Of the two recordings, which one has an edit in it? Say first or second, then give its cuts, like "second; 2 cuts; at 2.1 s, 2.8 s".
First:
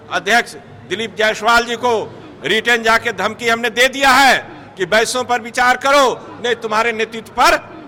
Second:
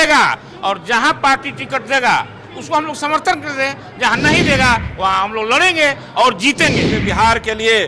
second; 1 cut; at 6.9 s